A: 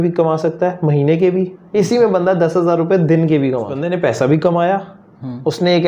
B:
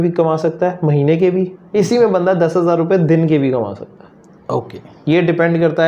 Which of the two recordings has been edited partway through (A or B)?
A